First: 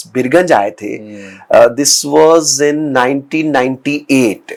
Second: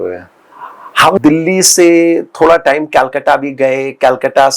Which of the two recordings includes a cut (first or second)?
second